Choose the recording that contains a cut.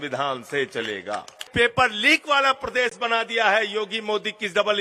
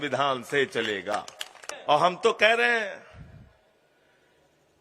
first; 1 cut; at 1.5 s

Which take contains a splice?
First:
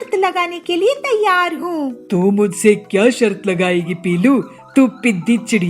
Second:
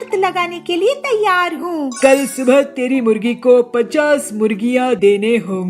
second; 1 cut; at 1.9 s

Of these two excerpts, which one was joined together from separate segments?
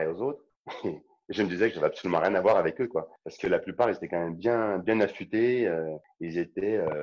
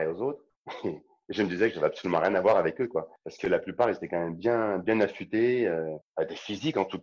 second; 1 cut; at 6.0 s

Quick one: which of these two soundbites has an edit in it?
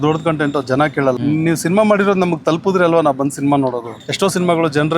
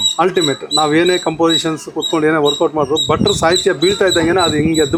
first; 2 cuts; at 1.2 s, 4.0 s

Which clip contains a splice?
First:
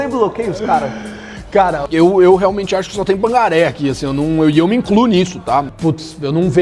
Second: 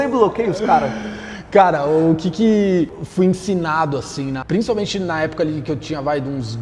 first; 2 cuts; at 1.8 s, 5.7 s

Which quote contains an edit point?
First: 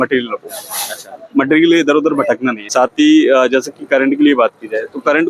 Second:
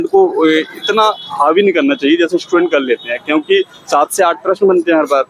first; 1 cut; at 2.6 s

